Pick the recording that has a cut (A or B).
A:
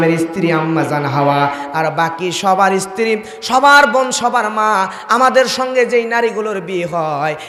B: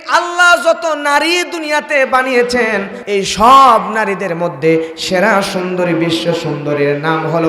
B